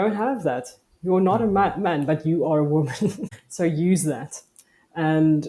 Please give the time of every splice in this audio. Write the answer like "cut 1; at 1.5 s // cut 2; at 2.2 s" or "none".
cut 1; at 3.4 s